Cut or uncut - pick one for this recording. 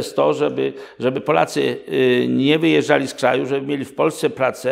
uncut